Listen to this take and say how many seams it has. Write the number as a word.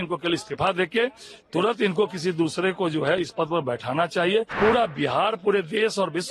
one